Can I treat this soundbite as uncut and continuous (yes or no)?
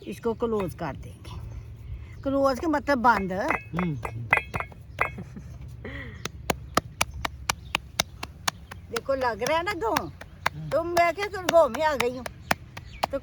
yes